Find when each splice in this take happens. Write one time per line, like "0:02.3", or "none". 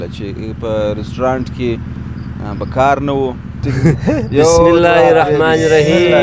0:03.5